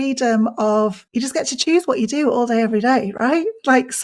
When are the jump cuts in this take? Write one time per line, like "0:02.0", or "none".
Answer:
0:01.0